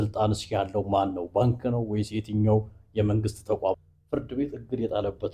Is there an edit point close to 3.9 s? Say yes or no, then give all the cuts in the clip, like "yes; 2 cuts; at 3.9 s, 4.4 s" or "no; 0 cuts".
yes; 1 cut; at 3.9 s